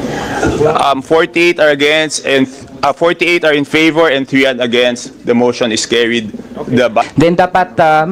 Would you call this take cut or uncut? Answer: cut